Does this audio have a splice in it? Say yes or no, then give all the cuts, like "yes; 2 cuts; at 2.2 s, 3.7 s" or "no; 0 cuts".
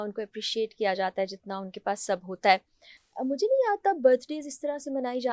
no; 0 cuts